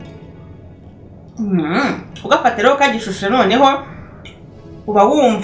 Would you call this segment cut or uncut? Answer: uncut